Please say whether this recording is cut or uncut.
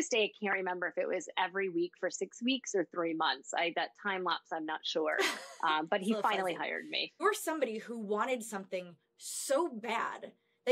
cut